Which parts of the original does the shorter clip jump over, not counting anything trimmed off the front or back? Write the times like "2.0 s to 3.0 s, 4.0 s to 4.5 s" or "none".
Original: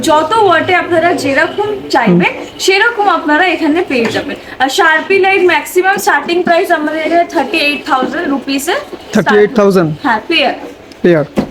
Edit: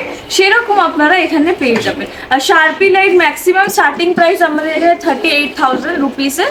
none

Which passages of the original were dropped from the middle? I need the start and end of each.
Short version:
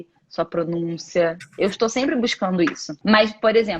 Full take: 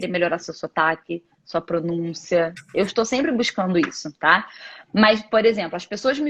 4.0 s to 4.8 s

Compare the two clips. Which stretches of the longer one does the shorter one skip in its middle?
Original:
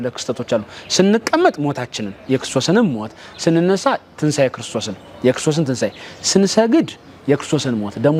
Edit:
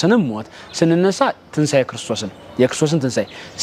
none

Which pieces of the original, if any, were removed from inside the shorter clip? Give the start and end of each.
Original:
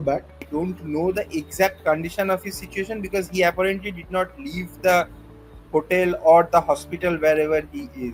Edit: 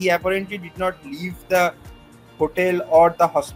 none

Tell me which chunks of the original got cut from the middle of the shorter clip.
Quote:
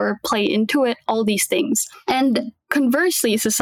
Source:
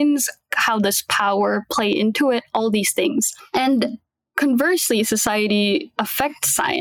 4.0 s to 4.2 s

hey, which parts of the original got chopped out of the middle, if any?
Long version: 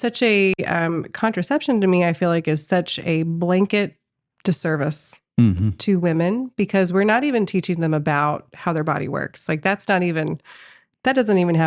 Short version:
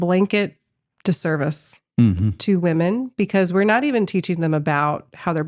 none

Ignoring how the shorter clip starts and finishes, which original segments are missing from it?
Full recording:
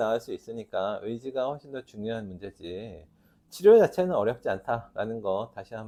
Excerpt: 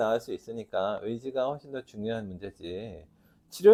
none

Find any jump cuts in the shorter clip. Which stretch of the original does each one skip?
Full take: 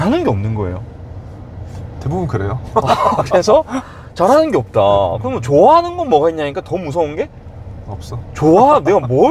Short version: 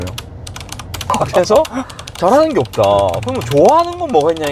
1.8 s to 3.1 s

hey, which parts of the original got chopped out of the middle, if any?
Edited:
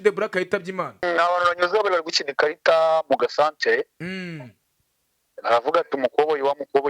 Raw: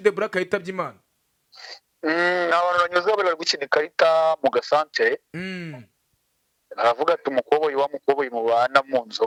1.0 s to 2.4 s

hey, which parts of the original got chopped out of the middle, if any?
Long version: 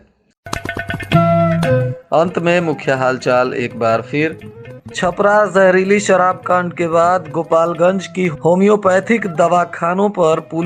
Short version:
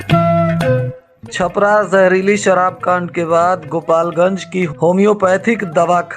2.0 s to 4.6 s

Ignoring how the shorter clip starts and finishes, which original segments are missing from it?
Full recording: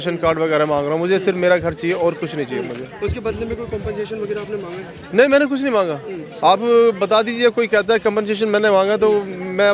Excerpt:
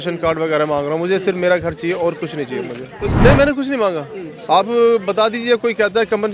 3.2 s to 5.1 s

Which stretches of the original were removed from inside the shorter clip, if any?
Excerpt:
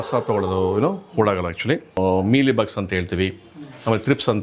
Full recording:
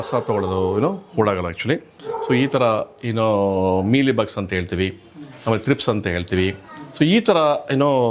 2.0 s to 3.6 s

